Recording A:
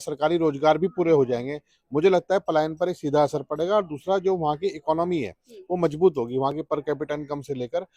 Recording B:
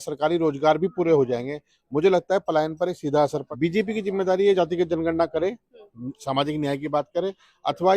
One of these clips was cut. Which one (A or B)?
B